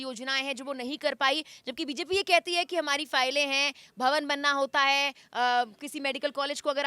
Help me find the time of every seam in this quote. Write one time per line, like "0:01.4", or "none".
none